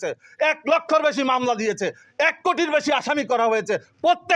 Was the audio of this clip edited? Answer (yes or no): no